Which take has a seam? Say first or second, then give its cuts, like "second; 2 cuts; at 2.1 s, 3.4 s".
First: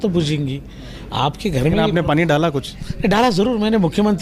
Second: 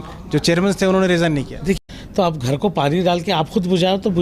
second; 1 cut; at 1.8 s